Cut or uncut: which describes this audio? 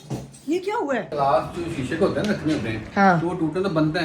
cut